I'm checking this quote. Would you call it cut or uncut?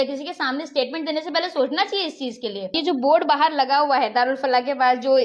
cut